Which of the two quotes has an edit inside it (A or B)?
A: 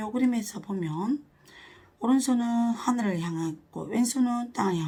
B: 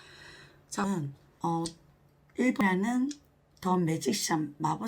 B